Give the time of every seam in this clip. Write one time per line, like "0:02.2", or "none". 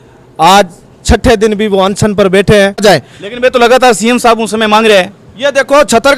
0:02.8